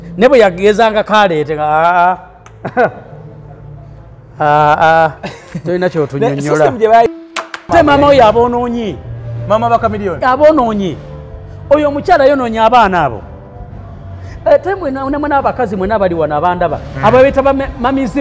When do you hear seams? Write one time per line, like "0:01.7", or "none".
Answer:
0:07.7